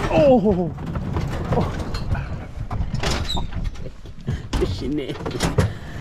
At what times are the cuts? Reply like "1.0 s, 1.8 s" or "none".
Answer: none